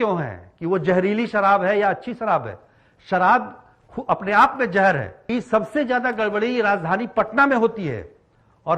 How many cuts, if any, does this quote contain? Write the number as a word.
one